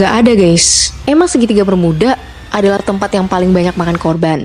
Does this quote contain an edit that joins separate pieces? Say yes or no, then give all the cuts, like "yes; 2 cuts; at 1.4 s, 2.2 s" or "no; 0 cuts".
yes; 1 cut; at 1.1 s